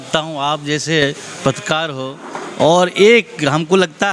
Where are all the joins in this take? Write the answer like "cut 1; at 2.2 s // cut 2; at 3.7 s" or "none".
none